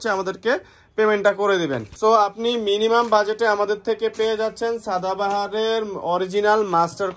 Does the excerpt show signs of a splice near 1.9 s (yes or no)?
yes